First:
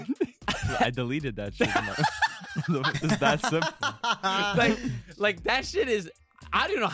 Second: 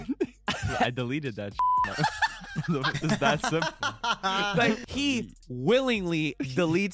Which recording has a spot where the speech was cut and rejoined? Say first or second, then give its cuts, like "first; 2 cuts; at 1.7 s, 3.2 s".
second; 1 cut; at 4.8 s